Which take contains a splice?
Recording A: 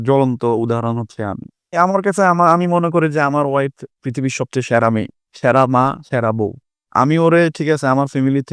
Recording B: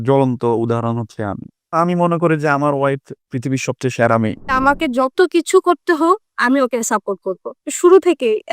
B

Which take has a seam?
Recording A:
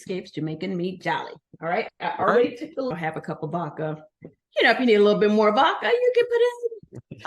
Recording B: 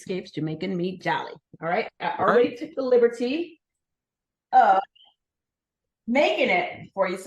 A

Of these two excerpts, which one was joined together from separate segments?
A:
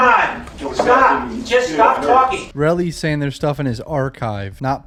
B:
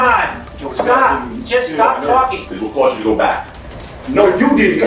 B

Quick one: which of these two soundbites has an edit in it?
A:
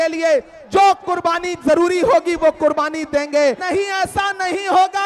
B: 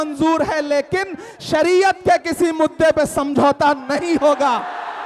A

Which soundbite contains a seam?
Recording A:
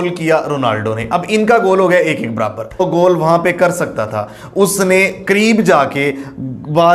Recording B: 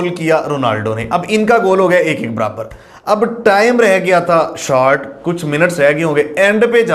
A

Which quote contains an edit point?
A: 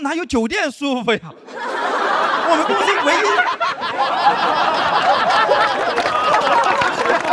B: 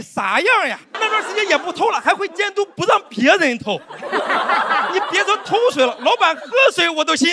B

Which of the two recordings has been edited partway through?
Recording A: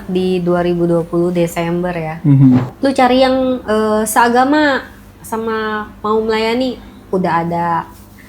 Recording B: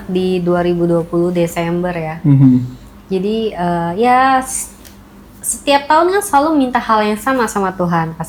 A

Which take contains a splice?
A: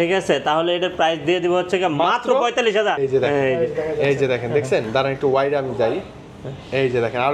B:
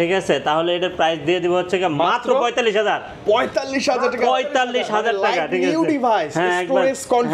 A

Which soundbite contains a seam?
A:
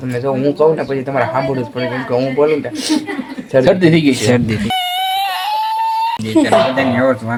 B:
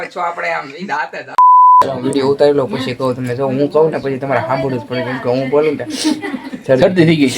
B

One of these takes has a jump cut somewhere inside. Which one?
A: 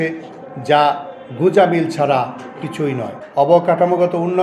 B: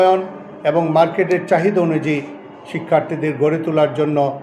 A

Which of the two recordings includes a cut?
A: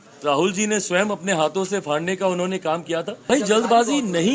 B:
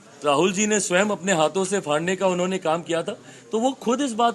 A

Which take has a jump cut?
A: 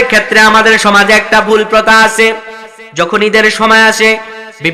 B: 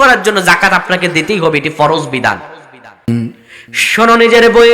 B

